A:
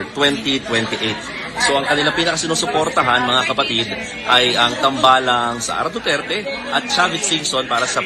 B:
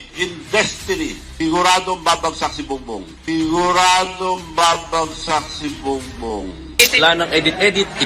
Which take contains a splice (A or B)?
B